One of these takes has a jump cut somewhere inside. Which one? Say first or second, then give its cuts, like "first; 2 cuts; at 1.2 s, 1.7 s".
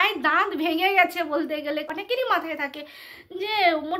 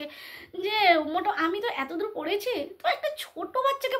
first; 1 cut; at 1.9 s